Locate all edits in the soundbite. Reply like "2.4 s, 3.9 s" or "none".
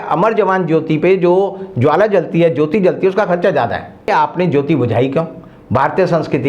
4.1 s